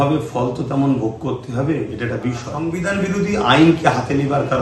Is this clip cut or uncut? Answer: cut